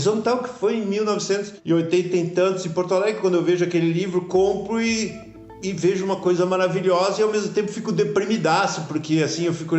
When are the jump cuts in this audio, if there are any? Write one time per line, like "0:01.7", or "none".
none